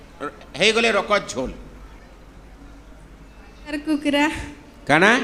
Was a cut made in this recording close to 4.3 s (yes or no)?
no